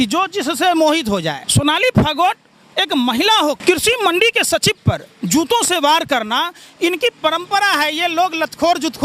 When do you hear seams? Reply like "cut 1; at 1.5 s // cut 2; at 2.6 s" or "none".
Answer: cut 1; at 1.4 s // cut 2; at 3.6 s